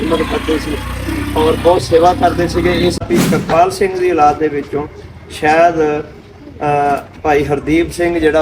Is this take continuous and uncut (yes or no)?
no